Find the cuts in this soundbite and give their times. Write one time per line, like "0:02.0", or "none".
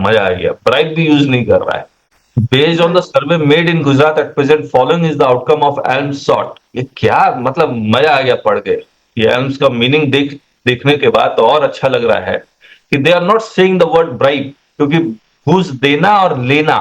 0:02.1